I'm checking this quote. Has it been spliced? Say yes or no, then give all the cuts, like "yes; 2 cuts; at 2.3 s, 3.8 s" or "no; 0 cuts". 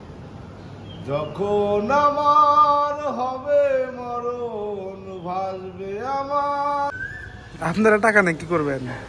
yes; 1 cut; at 6.9 s